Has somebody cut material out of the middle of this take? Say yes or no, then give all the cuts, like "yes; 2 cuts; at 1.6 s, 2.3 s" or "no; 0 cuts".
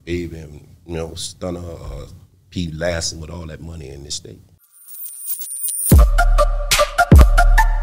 yes; 1 cut; at 4.5 s